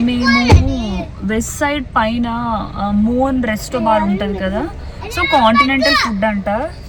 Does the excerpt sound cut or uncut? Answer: uncut